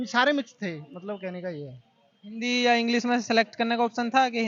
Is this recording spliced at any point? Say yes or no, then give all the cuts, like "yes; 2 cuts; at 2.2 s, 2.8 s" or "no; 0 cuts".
no; 0 cuts